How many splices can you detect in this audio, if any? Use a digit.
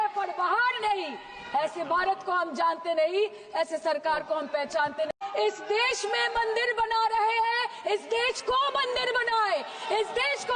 1